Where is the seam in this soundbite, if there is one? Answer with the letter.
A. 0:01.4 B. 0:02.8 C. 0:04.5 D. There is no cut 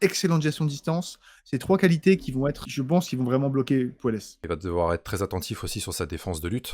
C